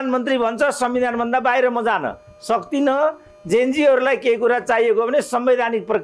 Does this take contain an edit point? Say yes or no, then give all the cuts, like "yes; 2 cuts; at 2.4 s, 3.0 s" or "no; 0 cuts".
no; 0 cuts